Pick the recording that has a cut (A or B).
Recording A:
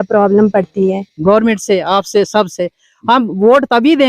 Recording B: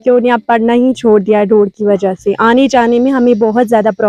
A